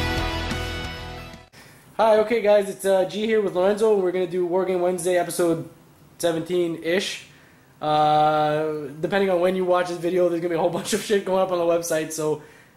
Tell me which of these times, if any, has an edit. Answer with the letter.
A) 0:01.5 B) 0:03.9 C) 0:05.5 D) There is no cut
D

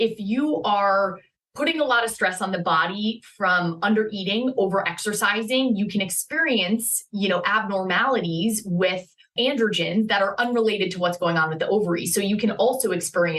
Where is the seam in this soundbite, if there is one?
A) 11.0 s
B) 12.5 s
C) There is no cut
C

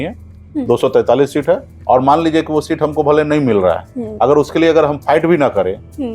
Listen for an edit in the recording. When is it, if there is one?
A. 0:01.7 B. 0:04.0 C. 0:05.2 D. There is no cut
A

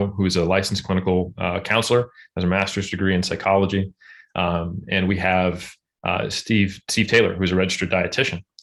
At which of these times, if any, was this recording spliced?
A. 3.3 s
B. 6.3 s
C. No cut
C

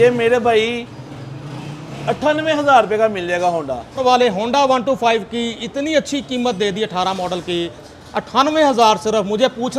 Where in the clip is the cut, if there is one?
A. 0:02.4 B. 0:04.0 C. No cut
B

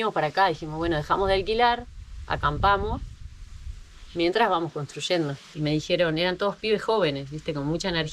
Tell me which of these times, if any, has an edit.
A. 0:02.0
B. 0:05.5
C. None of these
B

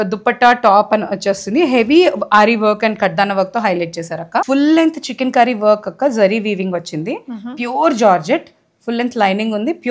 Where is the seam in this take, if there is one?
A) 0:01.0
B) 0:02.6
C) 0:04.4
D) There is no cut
C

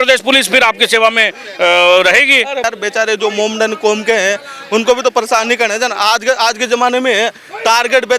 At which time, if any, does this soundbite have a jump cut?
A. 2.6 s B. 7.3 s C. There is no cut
A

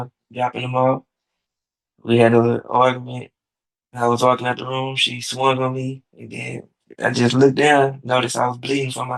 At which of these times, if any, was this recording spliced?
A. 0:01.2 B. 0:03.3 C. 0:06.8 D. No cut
D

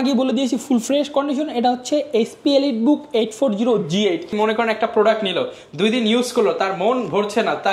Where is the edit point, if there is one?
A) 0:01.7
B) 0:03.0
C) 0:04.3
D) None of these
C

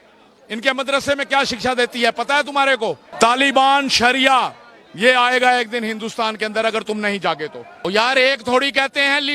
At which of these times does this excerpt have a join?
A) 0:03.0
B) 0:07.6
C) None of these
B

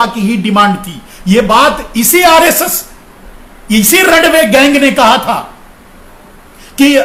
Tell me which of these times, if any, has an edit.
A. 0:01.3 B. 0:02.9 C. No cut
C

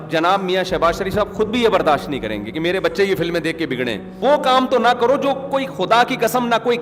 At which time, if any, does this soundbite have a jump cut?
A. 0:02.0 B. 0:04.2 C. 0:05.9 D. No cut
B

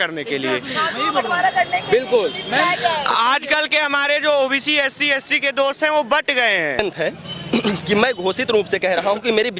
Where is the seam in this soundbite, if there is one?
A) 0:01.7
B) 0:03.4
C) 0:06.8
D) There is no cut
C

